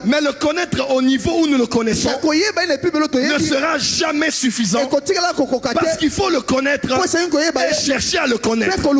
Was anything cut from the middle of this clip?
no; 0 cuts

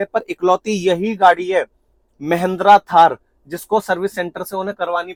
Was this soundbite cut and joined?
no; 0 cuts

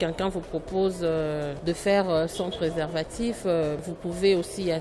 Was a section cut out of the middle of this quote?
yes; 2 cuts; at 1.5 s, 3.8 s

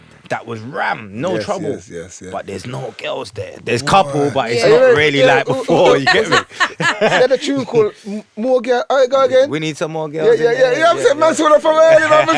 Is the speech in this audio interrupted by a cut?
no; 0 cuts

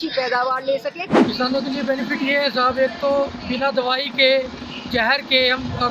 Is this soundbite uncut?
no; 1 cut; at 1.2 s

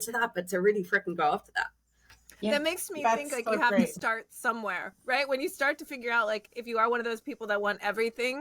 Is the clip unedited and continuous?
yes; 0 cuts

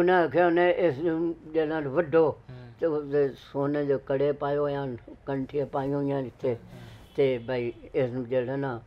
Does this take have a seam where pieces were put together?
no; 0 cuts

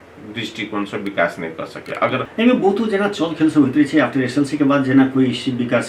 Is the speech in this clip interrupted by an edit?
yes; 1 cut; at 2.2 s

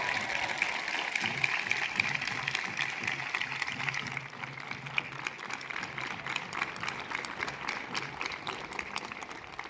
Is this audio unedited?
yes; 0 cuts

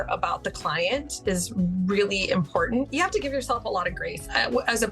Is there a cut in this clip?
yes; 1 cut; at 2.9 s

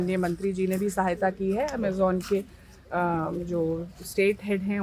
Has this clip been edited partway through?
no; 0 cuts

